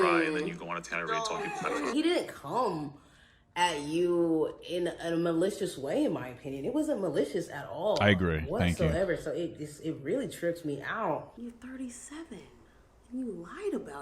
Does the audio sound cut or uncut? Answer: cut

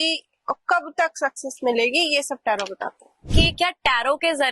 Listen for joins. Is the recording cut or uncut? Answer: cut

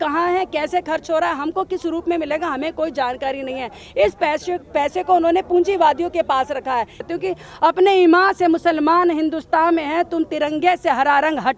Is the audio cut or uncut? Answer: cut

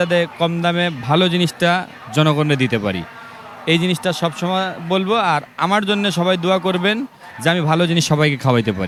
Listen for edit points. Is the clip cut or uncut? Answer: uncut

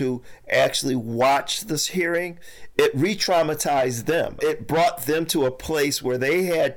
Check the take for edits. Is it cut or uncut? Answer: uncut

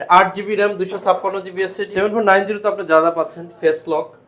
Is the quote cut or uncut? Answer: cut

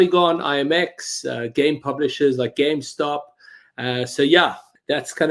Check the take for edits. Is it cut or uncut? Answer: uncut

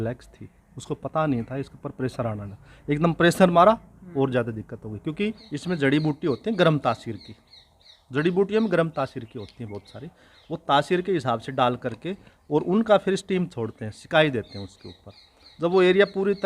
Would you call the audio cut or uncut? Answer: cut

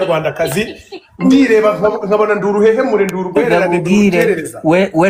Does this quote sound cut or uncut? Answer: uncut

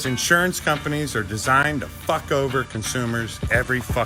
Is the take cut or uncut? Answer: uncut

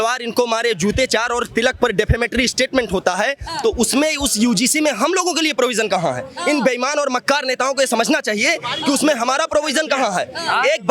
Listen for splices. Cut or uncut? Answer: uncut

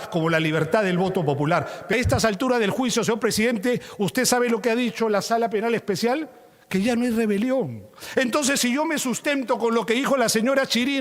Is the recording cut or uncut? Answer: cut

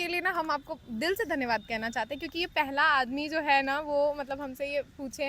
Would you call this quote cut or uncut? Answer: uncut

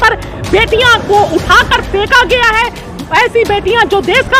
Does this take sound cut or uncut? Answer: uncut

